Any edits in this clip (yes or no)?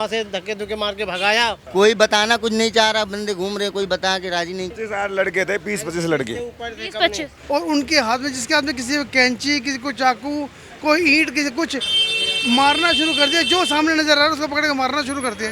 yes